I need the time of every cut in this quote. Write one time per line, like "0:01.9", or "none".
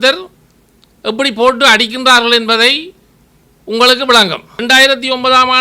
0:04.5